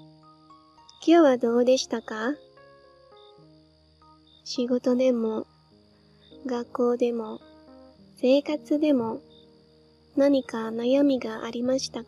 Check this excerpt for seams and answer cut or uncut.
cut